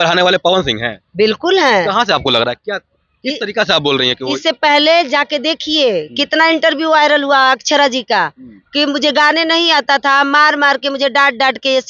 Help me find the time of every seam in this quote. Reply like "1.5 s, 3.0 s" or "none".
none